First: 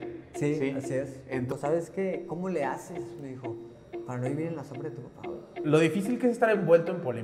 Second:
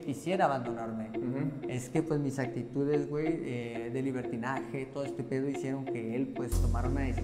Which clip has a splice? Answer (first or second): first